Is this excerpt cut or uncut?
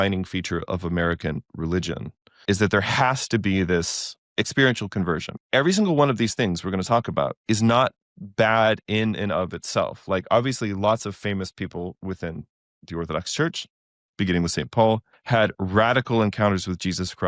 cut